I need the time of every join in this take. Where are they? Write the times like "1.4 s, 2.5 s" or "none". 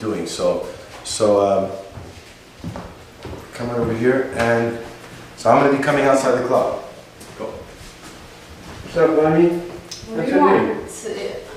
8.3 s

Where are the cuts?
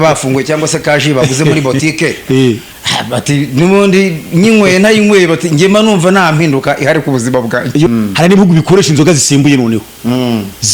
7.9 s

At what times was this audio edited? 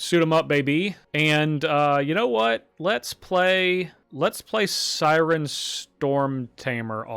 1.0 s, 4.0 s

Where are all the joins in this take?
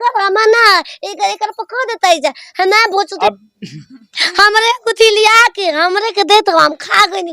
3.1 s

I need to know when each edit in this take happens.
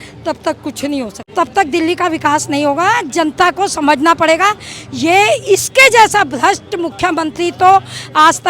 1.2 s

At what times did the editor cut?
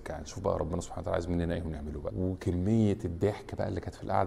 2.1 s

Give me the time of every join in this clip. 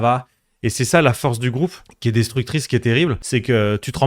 1.9 s, 3.2 s

